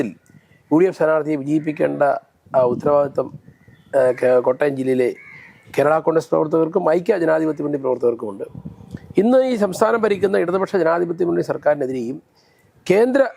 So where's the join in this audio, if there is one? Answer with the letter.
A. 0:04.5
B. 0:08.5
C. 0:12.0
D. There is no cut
D